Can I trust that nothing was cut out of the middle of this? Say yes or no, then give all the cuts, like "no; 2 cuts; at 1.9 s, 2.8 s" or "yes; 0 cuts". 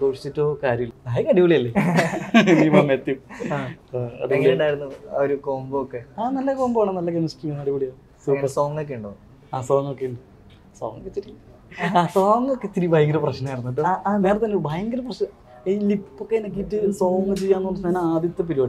no; 1 cut; at 0.9 s